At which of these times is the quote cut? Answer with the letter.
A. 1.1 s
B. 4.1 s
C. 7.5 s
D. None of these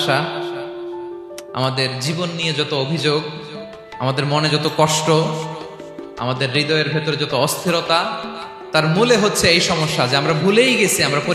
D